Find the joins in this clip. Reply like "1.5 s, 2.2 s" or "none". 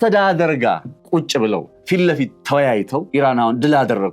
0.9 s, 1.7 s, 3.1 s